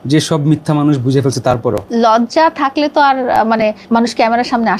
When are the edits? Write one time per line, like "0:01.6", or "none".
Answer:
0:01.8
0:03.8